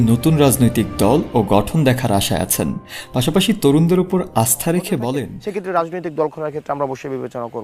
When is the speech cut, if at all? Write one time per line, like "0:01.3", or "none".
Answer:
0:05.4